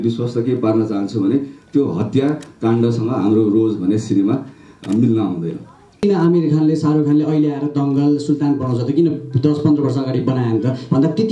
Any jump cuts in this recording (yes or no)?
yes